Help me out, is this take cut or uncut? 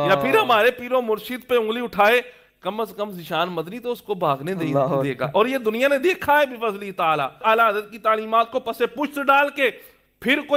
cut